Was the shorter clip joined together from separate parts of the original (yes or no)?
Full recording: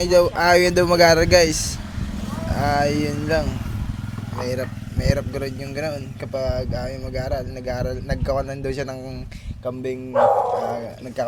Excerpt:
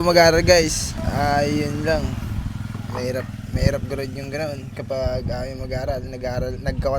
yes